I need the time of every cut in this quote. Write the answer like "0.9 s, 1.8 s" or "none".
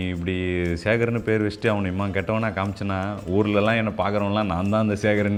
none